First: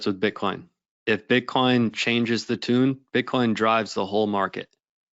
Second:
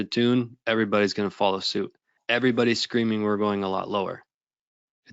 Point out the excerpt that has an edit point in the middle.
second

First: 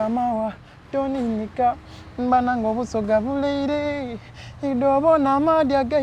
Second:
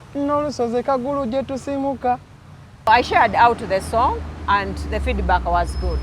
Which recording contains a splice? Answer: second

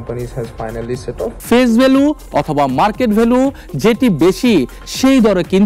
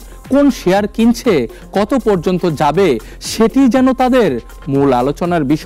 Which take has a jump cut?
first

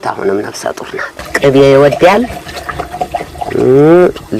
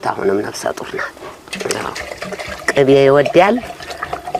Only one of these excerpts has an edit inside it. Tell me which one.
first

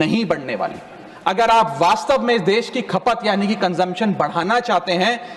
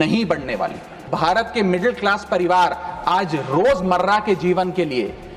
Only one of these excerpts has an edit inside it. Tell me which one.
second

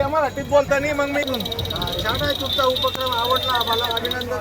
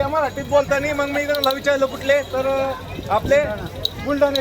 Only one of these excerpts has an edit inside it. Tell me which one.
first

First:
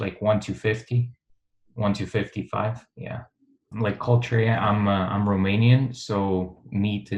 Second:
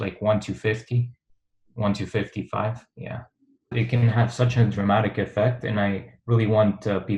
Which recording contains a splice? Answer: second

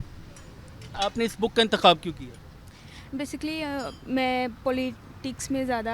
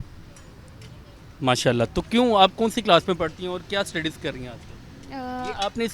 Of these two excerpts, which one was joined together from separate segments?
first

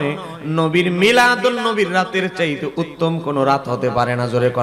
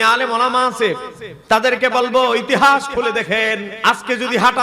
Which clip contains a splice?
second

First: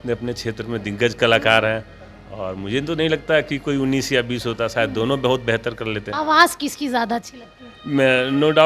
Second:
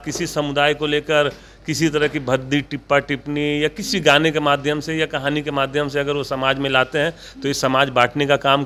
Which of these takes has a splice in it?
first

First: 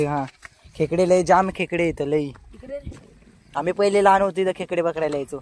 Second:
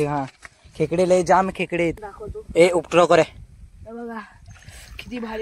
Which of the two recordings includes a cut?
second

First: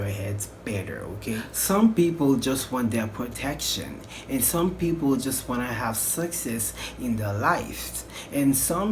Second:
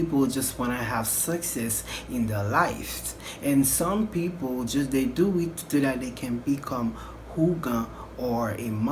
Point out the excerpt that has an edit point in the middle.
first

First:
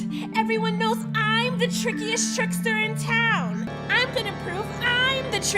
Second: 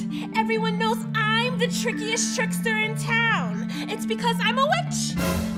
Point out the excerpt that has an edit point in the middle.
first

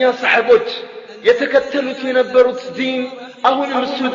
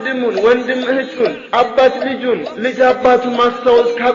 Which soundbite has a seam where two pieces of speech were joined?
second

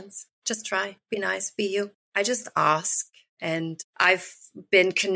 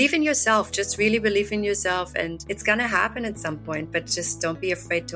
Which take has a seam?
first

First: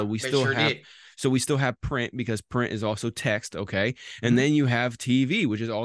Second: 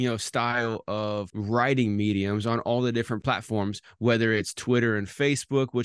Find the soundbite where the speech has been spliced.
second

